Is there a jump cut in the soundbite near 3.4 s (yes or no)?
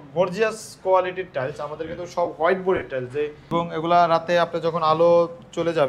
yes